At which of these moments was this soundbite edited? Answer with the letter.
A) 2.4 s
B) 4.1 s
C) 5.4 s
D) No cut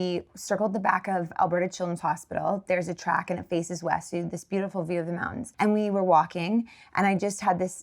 C